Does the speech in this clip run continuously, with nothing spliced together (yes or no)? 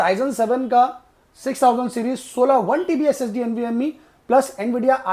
yes